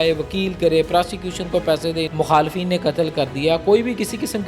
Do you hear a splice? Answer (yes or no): yes